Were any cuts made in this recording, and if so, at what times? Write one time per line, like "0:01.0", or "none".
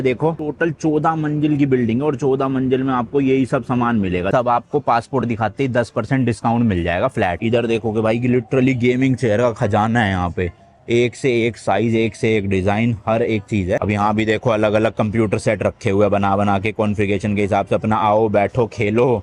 0:04.3
0:07.4
0:13.8